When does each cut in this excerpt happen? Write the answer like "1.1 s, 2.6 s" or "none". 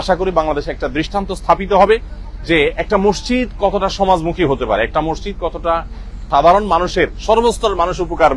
none

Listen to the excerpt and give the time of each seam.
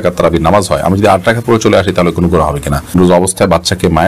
2.9 s

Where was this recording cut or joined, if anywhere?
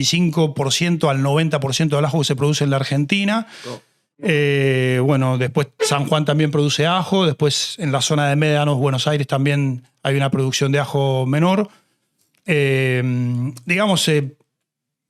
none

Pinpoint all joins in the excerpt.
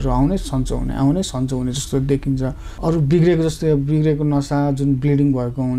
2.6 s

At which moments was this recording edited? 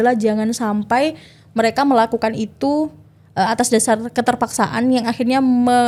none

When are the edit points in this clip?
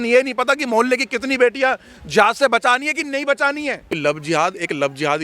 3.9 s

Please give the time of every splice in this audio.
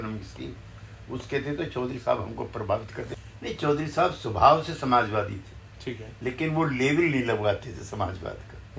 3.0 s

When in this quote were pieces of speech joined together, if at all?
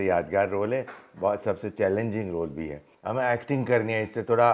2.8 s

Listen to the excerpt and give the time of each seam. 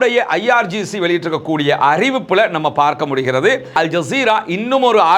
3.7 s

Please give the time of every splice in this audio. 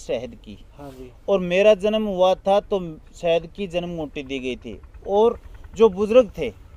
none

